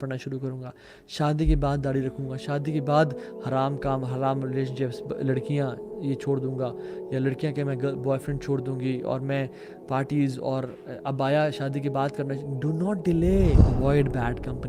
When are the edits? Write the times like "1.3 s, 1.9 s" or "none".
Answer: 13.6 s